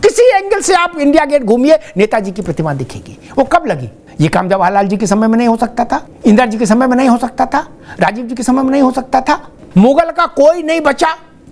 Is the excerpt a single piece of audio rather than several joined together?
no; 1 cut; at 9.6 s

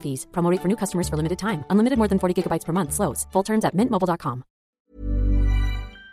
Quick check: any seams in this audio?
yes; 1 cut; at 4.8 s

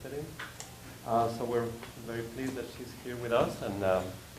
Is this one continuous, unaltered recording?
no; 1 cut; at 1.8 s

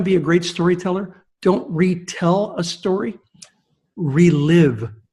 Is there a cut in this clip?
no; 0 cuts

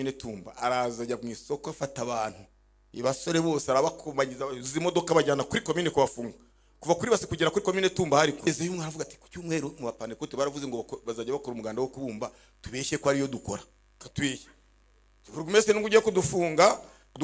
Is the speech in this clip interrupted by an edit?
yes; 2 cuts; at 8.5 s, 14.0 s

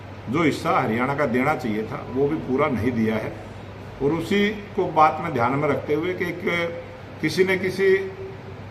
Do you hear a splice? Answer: no; 0 cuts

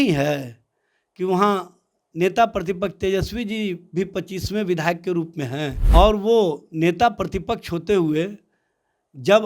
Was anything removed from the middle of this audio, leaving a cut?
yes; 1 cut; at 5.8 s

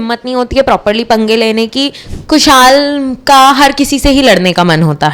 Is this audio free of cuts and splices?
no; 1 cut; at 2.1 s

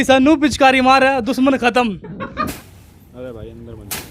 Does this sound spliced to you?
yes; 1 cut; at 2.6 s

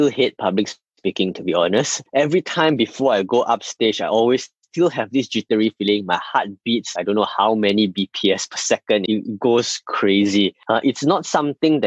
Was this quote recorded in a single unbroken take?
no; 1 cut; at 9.0 s

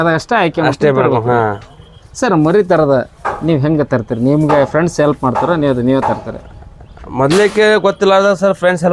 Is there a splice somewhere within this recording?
no; 0 cuts

